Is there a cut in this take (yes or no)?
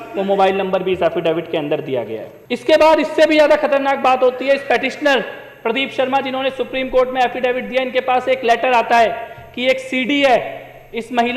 yes